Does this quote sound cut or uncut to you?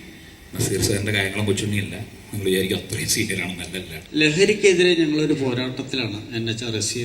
cut